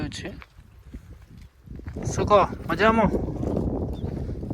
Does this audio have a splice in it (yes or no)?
no